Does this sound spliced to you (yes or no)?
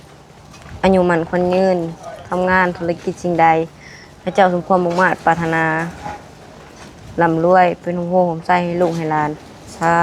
no